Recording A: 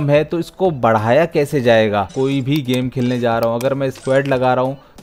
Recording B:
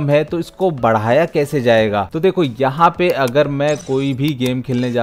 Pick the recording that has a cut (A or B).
A